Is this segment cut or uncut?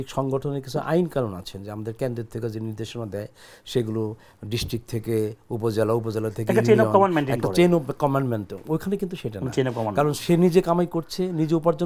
uncut